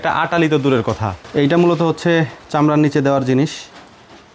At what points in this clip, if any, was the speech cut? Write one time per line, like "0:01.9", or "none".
0:01.1